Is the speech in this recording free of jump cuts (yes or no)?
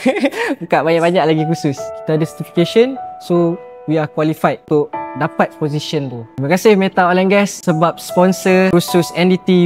no